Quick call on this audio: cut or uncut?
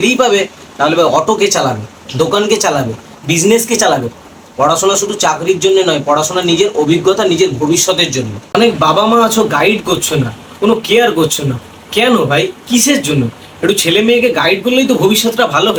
uncut